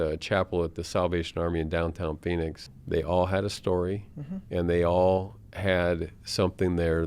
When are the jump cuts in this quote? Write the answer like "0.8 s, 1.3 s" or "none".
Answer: 2.7 s